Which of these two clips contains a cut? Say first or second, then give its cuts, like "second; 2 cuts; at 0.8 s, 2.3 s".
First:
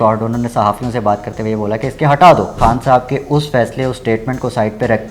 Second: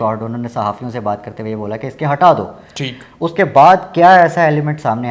first; 1 cut; at 2.5 s